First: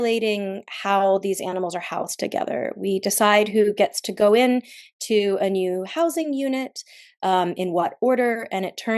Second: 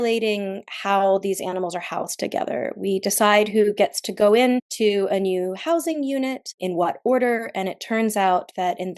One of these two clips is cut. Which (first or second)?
second